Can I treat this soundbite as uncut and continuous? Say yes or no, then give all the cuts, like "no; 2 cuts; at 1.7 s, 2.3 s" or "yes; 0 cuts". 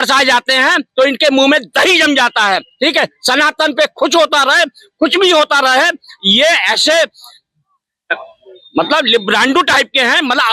yes; 0 cuts